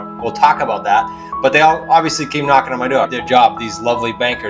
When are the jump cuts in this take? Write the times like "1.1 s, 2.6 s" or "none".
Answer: 3.2 s

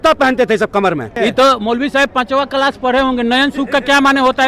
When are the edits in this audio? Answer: 1.1 s

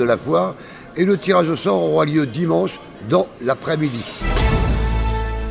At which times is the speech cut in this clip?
4.3 s

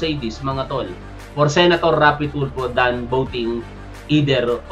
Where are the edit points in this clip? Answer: none

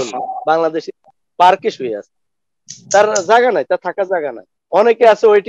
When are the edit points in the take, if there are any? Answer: 4.5 s

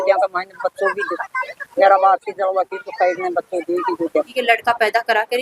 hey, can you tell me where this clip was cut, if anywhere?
4.3 s

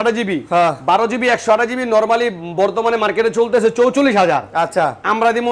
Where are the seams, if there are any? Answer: none

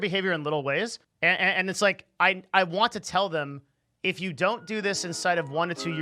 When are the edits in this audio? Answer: 1.0 s

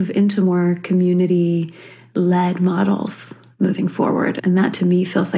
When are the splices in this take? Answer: 4.4 s

